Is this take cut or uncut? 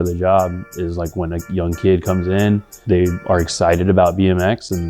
cut